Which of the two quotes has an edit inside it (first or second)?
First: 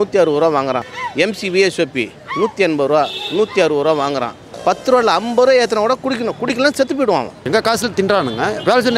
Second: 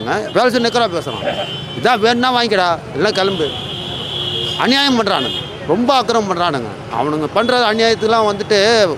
first